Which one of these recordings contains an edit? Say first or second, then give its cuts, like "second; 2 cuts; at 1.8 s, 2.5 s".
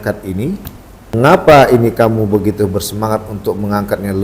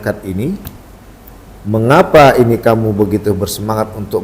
first; 1 cut; at 1.4 s